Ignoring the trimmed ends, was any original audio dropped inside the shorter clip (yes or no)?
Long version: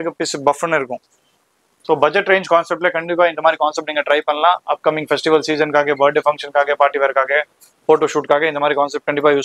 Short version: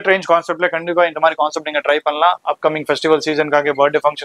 no